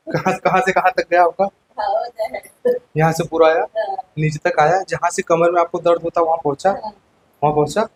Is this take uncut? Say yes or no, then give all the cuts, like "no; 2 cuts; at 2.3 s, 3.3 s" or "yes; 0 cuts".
yes; 0 cuts